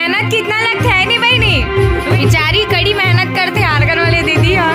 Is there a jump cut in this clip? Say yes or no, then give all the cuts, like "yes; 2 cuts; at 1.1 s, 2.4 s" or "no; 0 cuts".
yes; 1 cut; at 2.2 s